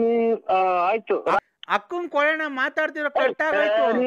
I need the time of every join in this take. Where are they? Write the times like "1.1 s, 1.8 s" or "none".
1.4 s